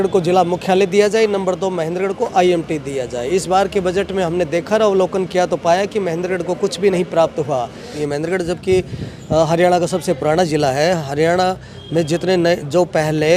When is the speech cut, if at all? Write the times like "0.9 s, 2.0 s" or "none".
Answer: 8.0 s